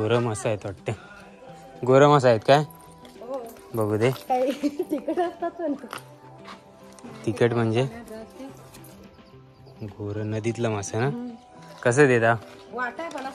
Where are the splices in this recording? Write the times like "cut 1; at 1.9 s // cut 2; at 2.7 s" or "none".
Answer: none